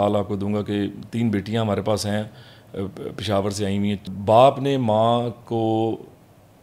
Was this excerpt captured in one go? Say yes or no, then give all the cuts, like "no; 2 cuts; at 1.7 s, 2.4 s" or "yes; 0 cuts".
no; 1 cut; at 4.1 s